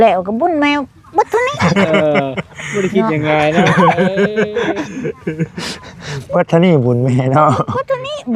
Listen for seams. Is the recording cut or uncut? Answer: uncut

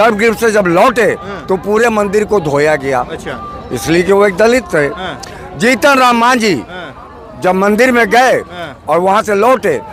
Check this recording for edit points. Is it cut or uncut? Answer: uncut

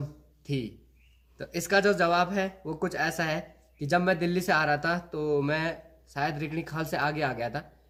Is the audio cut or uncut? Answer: uncut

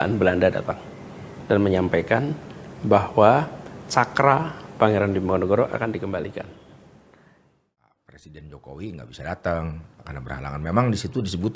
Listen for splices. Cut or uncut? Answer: cut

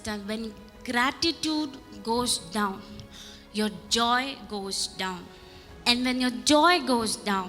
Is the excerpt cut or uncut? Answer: uncut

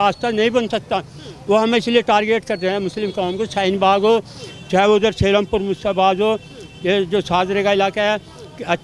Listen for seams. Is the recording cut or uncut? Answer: uncut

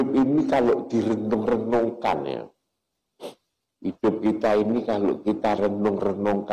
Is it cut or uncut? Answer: uncut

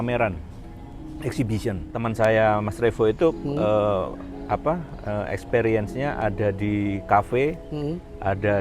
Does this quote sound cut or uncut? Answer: cut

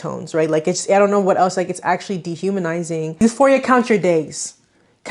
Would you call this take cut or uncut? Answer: cut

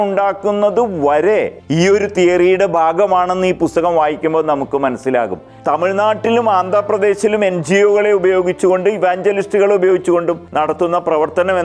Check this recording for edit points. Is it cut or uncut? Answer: cut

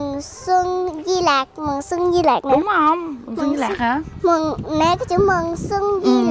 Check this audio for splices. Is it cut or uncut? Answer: uncut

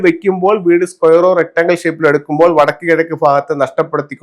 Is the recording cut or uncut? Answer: uncut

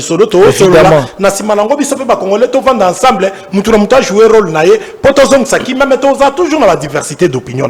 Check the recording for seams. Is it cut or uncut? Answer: uncut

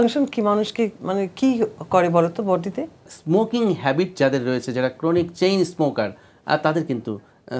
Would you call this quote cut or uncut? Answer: cut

